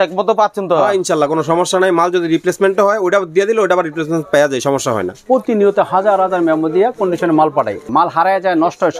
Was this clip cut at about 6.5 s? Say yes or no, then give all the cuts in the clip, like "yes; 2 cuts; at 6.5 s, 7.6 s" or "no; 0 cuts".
no; 2 cuts; at 5.2 s, 7.9 s